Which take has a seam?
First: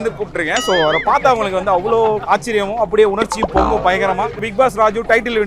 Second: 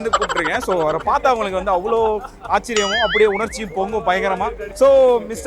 first; 2 cuts; at 2.2 s, 4.4 s

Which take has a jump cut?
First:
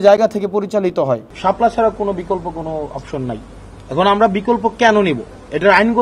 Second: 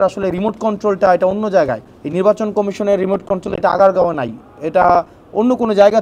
first; 1 cut; at 1.3 s

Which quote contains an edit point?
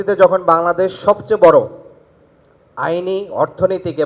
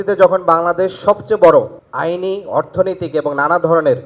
second; 1 cut; at 1.8 s

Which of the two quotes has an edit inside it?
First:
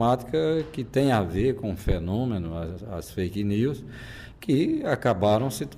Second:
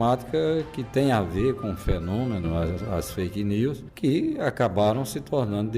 second; 1 cut; at 3.9 s

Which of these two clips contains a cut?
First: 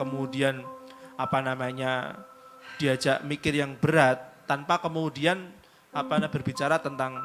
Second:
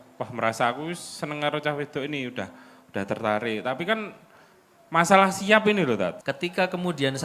second; 1 cut; at 6.2 s

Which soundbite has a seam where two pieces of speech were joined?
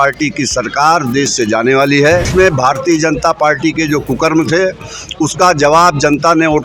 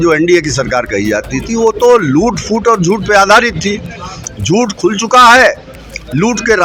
first; 1 cut; at 2.3 s

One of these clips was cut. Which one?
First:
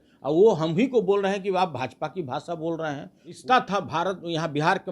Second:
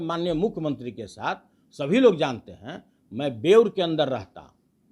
first; 1 cut; at 3.4 s

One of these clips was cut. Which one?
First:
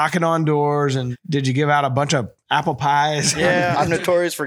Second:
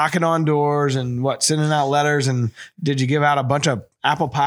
first; 2 cuts; at 1.1 s, 3.7 s

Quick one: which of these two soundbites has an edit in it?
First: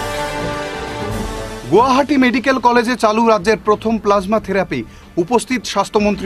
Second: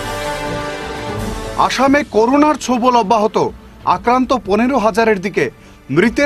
first; 1 cut; at 1.2 s

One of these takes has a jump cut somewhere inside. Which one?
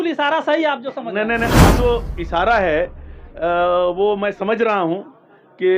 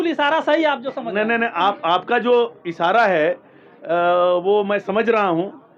first; 1 cut; at 1.8 s

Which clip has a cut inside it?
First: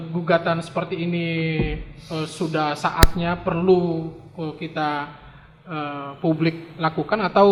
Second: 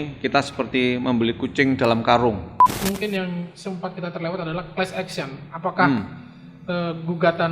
second; 1 cut; at 2.8 s

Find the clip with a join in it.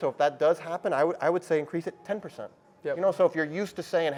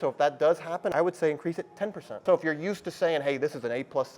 second; 2 cuts; at 0.9 s, 2.2 s

